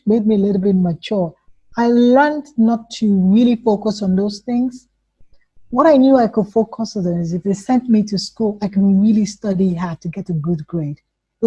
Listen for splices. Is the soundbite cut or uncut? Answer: uncut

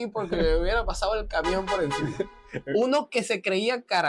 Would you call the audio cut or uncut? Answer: uncut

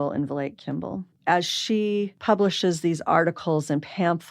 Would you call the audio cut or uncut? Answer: cut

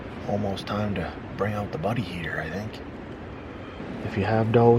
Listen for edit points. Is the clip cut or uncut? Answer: cut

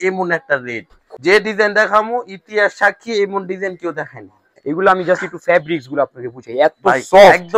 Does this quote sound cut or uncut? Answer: cut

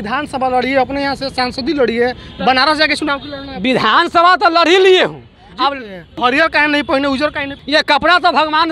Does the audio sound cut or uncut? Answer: cut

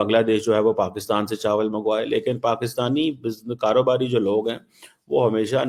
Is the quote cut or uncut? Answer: uncut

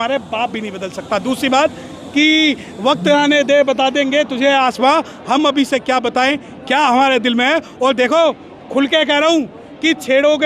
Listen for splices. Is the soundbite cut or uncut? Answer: uncut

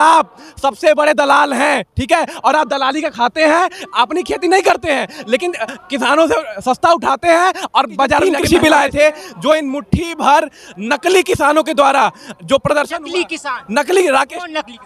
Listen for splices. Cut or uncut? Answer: cut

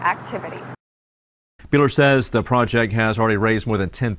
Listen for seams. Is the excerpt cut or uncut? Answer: cut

